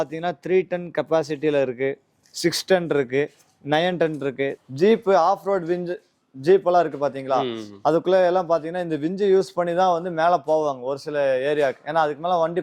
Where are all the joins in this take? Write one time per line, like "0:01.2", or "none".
0:04.6